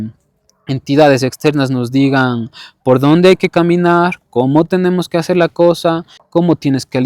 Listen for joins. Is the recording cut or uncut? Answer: cut